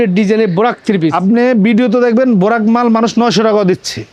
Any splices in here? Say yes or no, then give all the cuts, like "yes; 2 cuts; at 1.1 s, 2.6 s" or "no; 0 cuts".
no; 0 cuts